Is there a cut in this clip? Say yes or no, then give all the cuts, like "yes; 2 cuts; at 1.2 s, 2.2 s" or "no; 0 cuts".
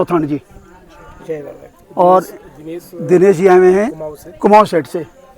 no; 0 cuts